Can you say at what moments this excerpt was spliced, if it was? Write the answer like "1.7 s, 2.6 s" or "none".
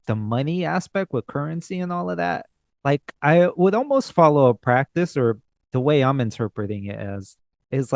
none